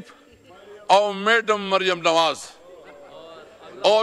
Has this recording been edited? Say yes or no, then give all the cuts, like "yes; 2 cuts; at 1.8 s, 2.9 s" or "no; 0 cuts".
no; 0 cuts